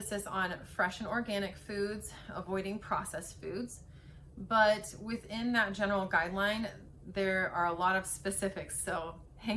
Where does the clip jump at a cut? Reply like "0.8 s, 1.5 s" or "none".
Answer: none